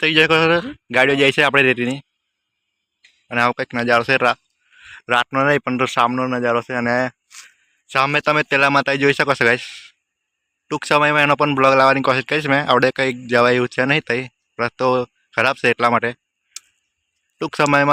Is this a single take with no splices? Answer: yes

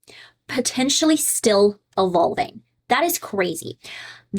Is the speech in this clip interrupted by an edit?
no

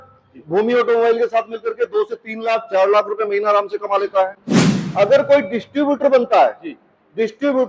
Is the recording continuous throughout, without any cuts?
yes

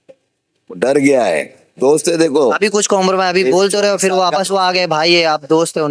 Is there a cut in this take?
no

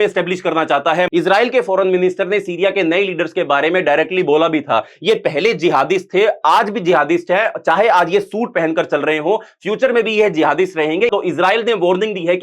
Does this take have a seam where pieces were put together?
yes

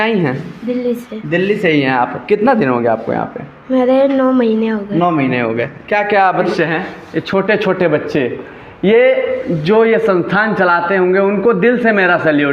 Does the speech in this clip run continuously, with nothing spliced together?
no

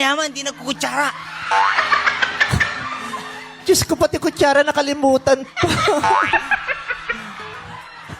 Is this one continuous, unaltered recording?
yes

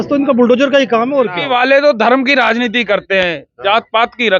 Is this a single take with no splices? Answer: no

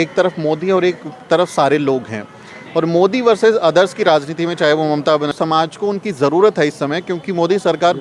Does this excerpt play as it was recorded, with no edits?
no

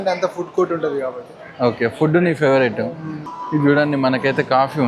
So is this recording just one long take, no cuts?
yes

